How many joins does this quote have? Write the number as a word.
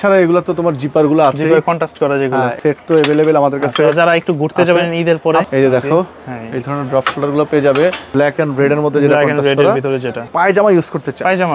four